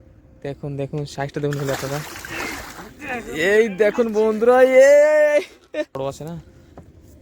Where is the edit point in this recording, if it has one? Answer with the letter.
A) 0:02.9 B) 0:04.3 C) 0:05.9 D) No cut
C